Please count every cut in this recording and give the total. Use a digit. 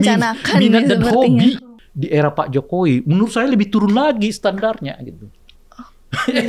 1